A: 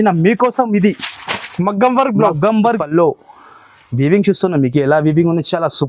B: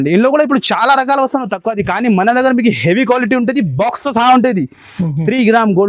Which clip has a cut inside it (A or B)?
A